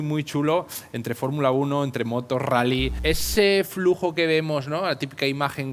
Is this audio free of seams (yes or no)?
no